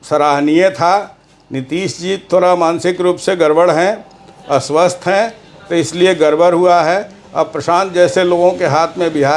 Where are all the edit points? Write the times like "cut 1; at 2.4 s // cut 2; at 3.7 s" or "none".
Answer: none

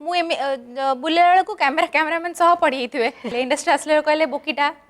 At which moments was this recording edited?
cut 1; at 3.3 s

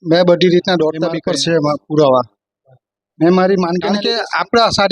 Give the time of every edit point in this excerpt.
cut 1; at 1.2 s // cut 2; at 4.0 s

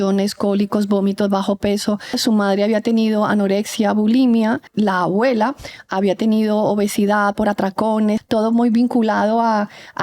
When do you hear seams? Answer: cut 1; at 2.2 s // cut 2; at 4.7 s // cut 3; at 8.2 s

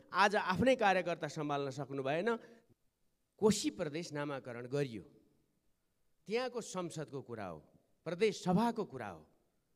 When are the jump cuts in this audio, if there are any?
cut 1; at 2.6 s

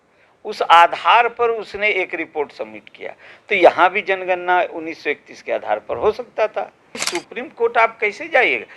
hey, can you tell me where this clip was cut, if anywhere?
cut 1; at 7.1 s

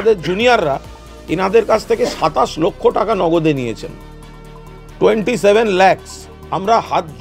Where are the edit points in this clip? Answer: none

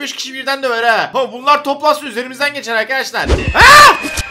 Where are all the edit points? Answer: cut 1; at 1.1 s // cut 2; at 3.4 s

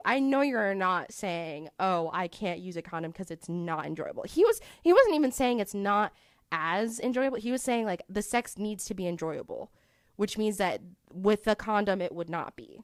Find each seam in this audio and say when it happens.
none

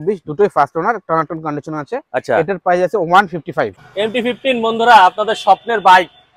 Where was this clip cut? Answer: cut 1; at 3.8 s

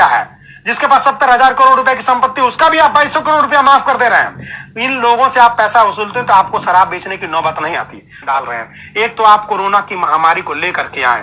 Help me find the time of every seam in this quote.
cut 1; at 8.2 s

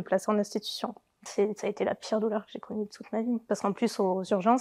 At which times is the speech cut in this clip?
cut 1; at 1.3 s

